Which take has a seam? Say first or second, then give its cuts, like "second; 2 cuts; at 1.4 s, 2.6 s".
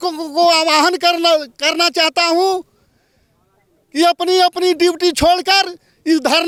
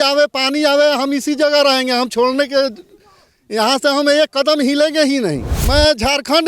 second; 1 cut; at 5.5 s